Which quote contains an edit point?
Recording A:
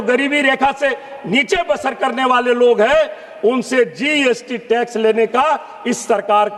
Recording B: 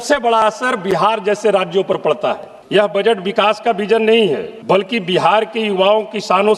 B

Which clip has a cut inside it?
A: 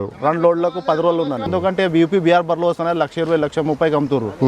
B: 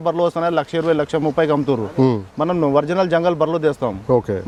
A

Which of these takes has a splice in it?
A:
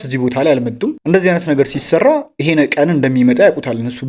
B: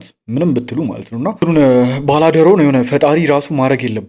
A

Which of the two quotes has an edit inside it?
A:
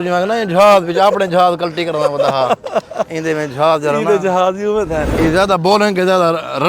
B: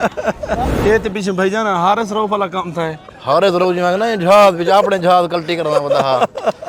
A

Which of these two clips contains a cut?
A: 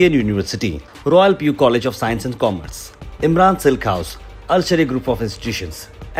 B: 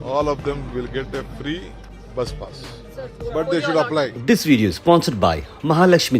B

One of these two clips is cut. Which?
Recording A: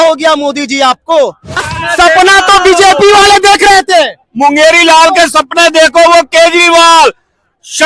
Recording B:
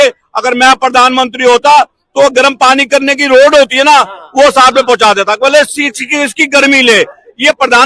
A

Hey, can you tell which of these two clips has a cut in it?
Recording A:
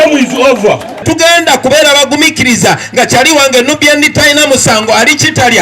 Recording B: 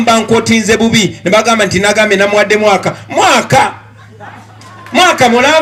A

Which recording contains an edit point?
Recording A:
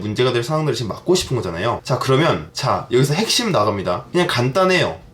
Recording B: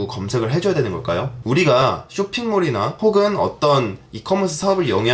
B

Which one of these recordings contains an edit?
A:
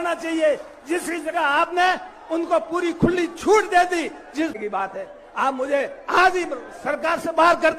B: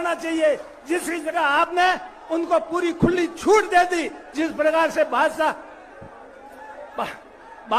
A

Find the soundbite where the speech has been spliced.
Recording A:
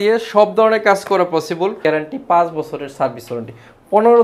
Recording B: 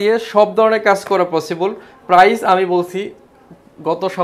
A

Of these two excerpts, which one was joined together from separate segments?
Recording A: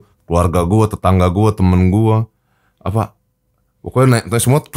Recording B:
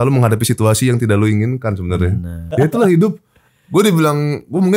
B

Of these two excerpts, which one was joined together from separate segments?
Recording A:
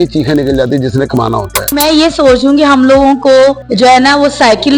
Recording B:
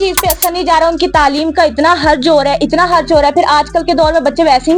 A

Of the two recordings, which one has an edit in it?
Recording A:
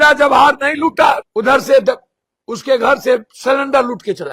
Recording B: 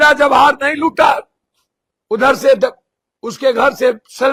A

